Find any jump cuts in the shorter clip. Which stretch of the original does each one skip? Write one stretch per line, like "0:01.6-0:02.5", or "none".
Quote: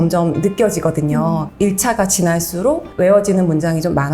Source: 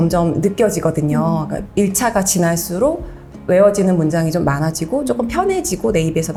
0:01.5-0:01.7
0:03.0-0:03.4